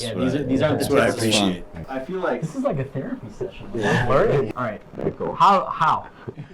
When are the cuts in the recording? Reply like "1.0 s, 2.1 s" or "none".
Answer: 1.8 s, 4.5 s